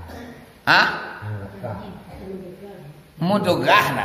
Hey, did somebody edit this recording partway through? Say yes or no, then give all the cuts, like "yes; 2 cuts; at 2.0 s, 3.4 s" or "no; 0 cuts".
no; 0 cuts